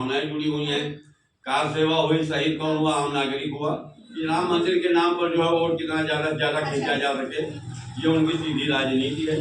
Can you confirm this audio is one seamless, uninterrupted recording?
no; 1 cut; at 4.1 s

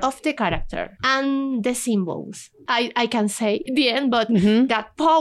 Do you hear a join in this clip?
yes; 3 cuts; at 0.9 s, 2.6 s, 3.6 s

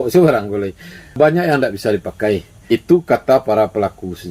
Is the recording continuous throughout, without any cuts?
no; 2 cuts; at 1.2 s, 2.6 s

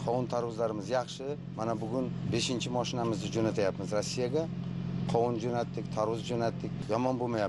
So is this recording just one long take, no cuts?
yes; 0 cuts

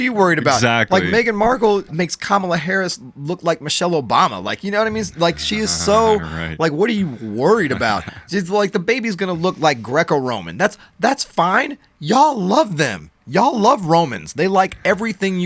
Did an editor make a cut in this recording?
yes; 1 cut; at 1.9 s

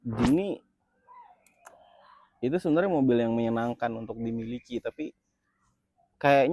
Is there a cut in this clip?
no; 0 cuts

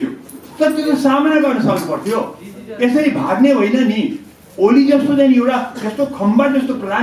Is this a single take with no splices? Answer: yes; 0 cuts

